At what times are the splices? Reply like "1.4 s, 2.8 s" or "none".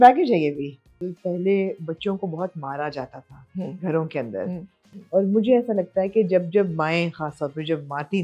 1.1 s, 4.7 s